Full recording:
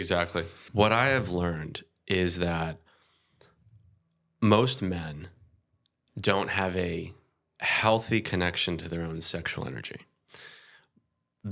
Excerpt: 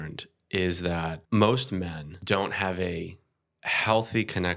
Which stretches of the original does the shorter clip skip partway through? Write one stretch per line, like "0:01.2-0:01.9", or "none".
0:02.8-0:04.3
0:05.2-0:06.0